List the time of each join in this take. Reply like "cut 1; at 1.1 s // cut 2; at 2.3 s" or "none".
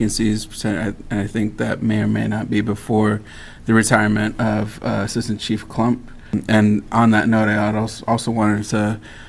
cut 1; at 6.3 s